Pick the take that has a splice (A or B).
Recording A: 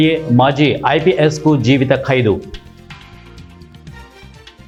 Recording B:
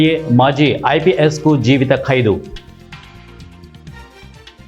B